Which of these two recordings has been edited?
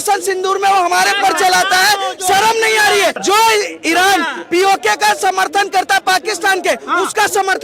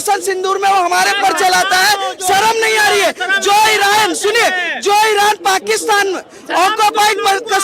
first; 1 cut; at 3.2 s

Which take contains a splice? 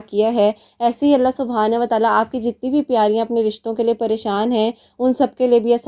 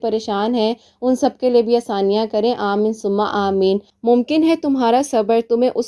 second; 1 cut; at 3.9 s

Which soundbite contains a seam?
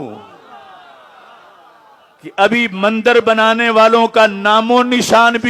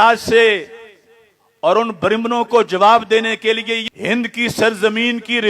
second; 1 cut; at 3.9 s

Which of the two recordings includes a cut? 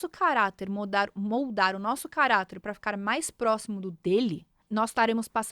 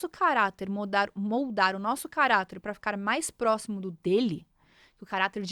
first; 1 cut; at 4.5 s

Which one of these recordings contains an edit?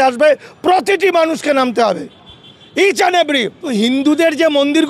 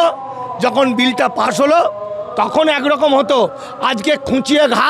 first; 1 cut; at 3.7 s

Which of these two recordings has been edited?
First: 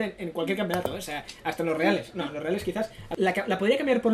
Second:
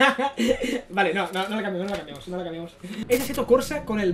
second; 1 cut; at 2.9 s

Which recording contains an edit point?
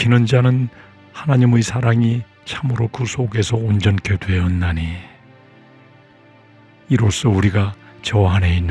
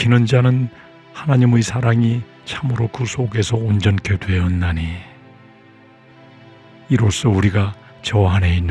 first; 2 cuts; at 5.3 s, 6.9 s

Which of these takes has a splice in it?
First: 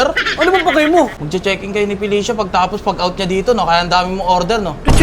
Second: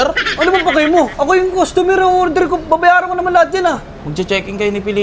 first; 1 cut; at 1.1 s

